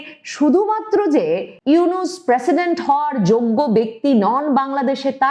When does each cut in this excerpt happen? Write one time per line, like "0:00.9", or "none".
0:01.5